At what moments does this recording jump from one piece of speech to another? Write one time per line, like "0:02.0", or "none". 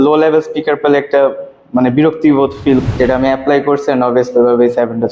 0:02.8